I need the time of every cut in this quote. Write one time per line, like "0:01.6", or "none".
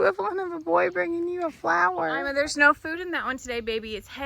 0:02.3